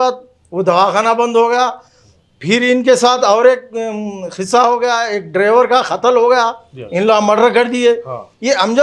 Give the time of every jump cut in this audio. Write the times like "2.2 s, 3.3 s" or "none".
none